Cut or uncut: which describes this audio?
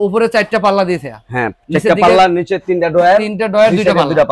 uncut